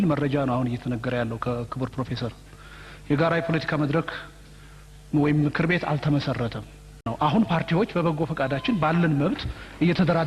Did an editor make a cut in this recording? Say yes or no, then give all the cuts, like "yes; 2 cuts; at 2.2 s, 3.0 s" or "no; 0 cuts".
yes; 1 cut; at 7.1 s